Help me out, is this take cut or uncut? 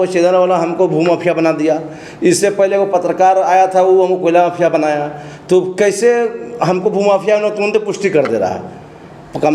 uncut